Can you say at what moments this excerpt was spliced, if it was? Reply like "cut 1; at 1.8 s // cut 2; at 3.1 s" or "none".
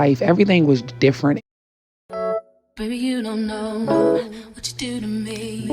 cut 1; at 1.4 s